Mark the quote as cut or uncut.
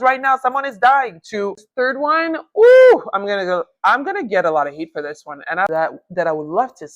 cut